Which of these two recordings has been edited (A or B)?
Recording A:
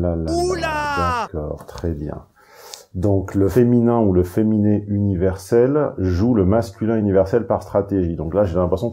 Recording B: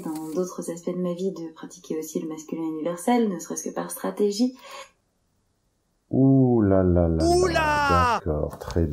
A